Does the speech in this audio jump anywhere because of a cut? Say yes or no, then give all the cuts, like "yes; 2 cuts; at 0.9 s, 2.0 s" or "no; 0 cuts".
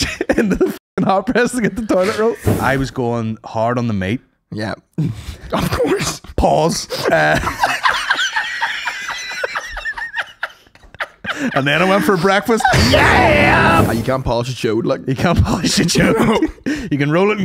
yes; 2 cuts; at 2.4 s, 13.8 s